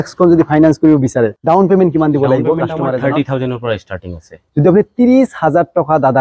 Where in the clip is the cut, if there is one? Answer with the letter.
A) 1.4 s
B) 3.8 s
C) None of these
A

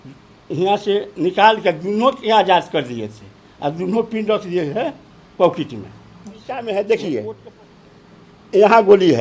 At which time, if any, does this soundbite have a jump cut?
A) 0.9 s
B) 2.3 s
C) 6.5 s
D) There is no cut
C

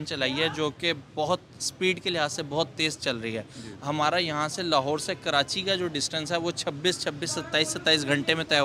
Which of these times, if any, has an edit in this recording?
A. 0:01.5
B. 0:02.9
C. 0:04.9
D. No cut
D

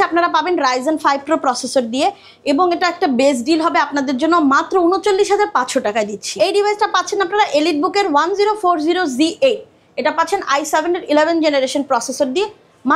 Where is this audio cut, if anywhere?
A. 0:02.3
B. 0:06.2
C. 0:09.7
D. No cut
B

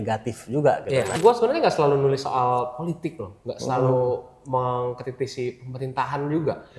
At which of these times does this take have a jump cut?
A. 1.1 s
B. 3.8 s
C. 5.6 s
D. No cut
A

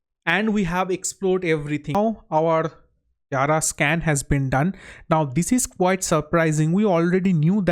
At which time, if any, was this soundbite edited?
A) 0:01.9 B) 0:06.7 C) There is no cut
A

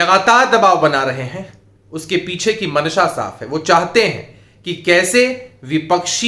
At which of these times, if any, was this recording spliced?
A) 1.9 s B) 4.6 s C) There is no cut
C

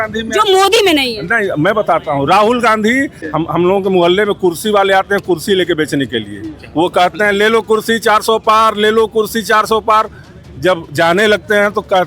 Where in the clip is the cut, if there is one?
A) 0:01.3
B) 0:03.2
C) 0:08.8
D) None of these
B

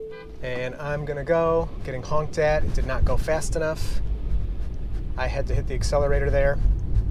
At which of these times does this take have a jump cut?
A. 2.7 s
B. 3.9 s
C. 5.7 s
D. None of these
D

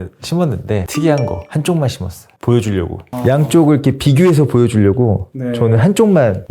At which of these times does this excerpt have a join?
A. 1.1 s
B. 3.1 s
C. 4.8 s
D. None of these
B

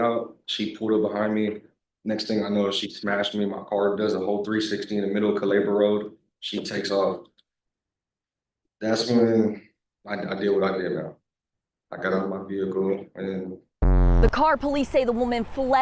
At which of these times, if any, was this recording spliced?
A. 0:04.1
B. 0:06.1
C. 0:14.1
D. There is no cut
C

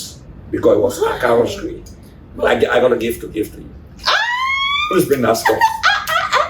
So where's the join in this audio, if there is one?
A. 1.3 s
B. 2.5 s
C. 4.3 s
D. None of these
B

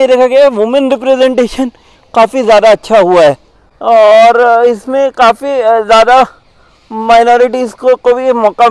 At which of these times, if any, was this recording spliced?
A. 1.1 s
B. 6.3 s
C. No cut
C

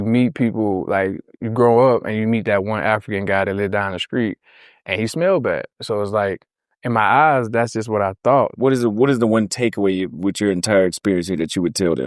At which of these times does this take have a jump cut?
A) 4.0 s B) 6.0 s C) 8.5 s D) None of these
C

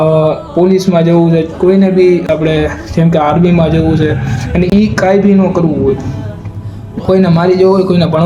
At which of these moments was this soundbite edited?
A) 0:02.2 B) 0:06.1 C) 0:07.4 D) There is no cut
D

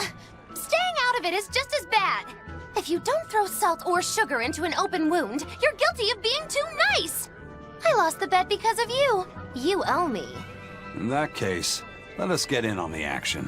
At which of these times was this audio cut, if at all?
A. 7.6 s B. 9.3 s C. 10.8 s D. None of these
B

